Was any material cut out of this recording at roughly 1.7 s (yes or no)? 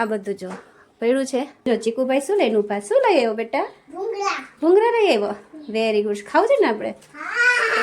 yes